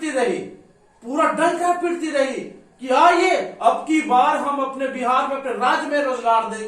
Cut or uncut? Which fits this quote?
uncut